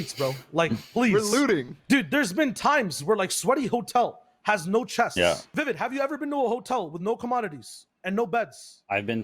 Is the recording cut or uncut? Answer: cut